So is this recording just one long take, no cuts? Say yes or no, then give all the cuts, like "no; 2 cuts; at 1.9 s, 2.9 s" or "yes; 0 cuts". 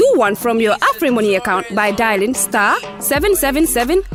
yes; 0 cuts